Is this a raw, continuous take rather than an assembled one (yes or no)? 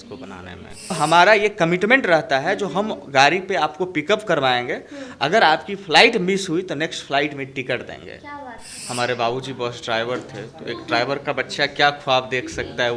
no